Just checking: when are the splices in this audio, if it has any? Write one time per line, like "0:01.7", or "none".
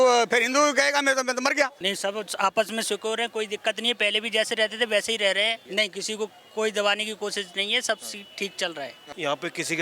0:01.8
0:05.6
0:09.0